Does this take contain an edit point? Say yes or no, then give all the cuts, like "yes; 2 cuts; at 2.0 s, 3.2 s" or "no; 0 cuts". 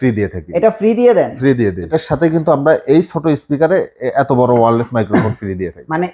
yes; 1 cut; at 1.9 s